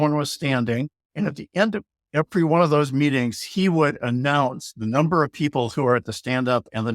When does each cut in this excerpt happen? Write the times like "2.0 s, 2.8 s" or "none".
1.0 s